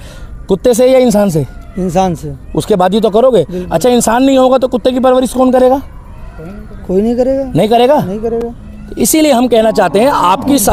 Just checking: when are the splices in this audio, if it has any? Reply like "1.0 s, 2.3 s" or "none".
none